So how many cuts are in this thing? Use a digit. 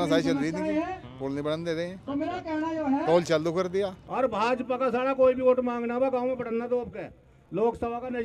1